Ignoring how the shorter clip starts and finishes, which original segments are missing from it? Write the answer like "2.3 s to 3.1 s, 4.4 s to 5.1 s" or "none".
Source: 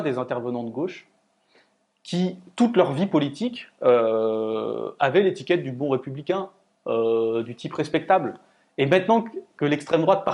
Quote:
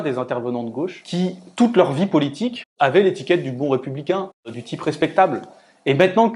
1.0 s to 2.0 s, 3.6 s to 4.8 s, 6.8 s to 7.5 s